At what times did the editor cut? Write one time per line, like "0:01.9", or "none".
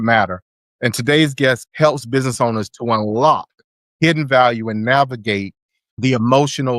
0:01.6